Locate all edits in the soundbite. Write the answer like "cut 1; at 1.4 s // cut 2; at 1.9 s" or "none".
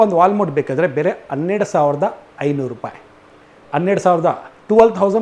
none